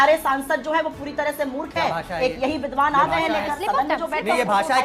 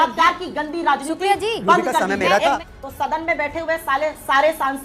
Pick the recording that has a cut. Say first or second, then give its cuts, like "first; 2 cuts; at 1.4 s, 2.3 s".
second; 1 cut; at 2.6 s